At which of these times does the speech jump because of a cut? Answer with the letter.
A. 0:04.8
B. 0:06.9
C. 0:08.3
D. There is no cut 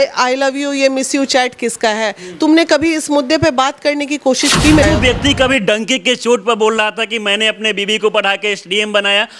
A